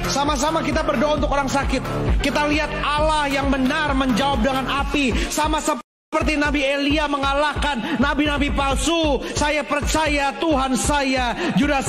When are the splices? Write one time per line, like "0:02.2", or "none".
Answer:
none